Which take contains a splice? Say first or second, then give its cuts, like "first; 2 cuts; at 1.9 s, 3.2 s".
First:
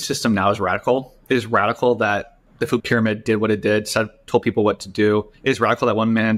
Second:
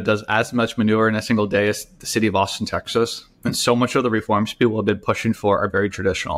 first; 2 cuts; at 2.7 s, 5.3 s